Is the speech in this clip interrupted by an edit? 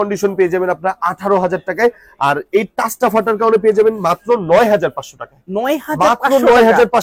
no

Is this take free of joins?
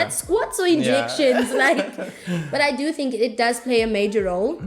yes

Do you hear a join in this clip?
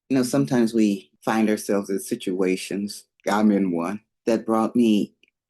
yes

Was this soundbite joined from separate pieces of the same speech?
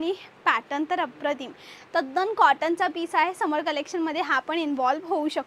no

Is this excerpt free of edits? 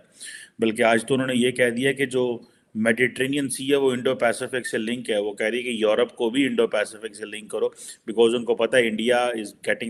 yes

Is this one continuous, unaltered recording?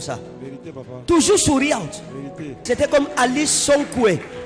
no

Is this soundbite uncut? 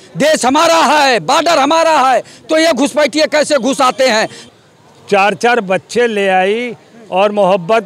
no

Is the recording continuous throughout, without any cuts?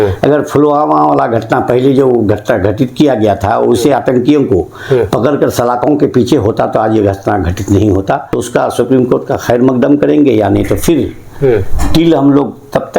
no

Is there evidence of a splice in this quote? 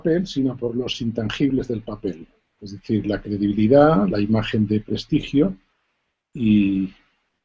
no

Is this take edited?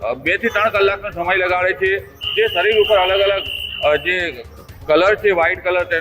no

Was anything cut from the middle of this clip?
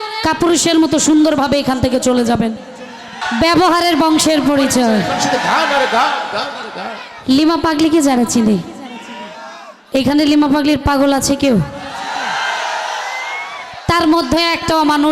yes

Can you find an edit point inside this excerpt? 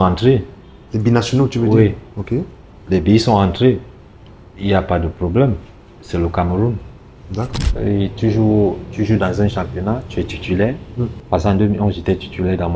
yes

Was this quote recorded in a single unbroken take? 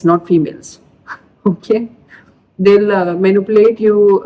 yes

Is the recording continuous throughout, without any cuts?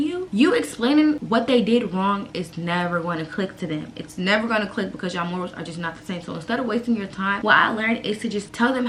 yes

